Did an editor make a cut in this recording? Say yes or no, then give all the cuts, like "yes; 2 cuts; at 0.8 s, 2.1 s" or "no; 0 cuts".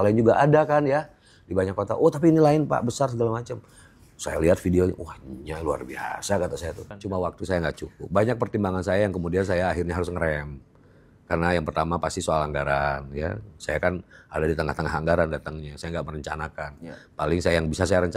yes; 1 cut; at 6.8 s